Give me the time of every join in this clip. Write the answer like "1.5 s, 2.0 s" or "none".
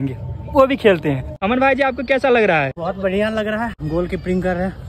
1.3 s, 2.8 s, 3.8 s

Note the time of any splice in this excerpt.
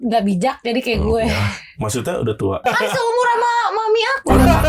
2.7 s

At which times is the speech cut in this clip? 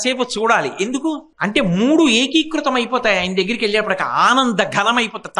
1.3 s

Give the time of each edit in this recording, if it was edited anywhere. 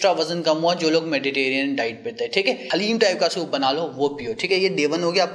2.6 s

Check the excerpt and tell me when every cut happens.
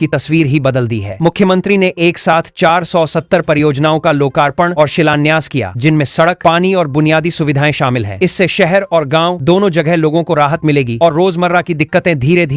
none

